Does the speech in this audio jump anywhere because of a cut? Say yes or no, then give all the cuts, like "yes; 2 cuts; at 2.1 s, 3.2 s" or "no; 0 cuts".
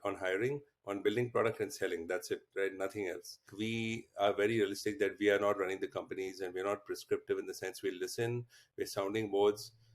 yes; 1 cut; at 3.5 s